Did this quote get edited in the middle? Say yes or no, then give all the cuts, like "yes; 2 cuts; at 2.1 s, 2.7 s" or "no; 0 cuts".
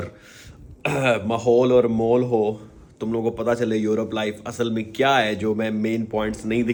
no; 0 cuts